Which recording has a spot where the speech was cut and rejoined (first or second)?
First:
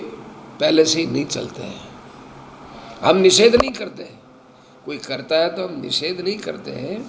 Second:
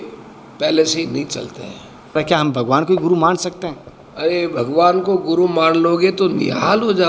second